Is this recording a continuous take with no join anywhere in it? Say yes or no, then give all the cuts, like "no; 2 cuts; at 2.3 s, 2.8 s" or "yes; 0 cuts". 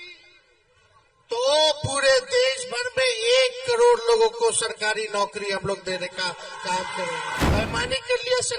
no; 1 cut; at 7.5 s